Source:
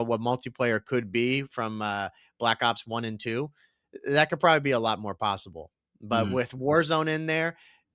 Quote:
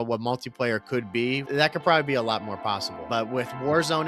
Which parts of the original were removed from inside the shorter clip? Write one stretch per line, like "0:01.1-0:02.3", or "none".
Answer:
0:01.4-0:04.0
0:05.5-0:05.9